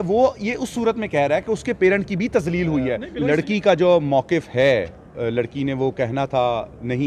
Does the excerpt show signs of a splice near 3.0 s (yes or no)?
yes